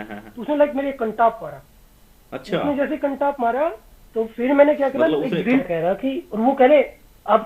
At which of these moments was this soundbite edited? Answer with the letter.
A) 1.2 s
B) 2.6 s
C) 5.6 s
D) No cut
C